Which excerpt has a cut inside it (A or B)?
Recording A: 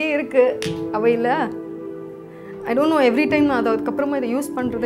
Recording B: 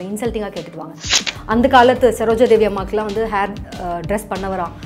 B